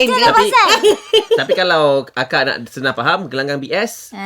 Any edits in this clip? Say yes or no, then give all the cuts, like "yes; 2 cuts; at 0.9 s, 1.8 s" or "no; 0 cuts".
no; 0 cuts